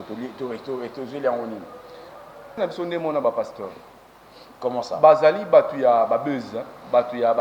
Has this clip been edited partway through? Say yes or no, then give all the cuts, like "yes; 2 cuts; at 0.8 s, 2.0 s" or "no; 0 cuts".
yes; 1 cut; at 2.6 s